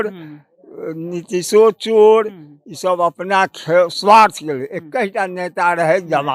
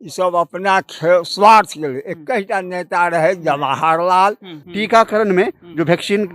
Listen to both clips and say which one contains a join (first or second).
second